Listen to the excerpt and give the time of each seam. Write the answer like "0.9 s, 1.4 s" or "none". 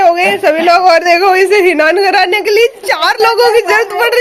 none